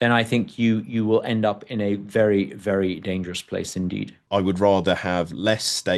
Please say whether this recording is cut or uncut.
cut